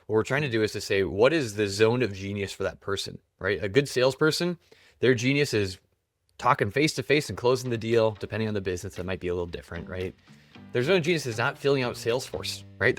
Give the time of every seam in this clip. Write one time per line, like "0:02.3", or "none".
none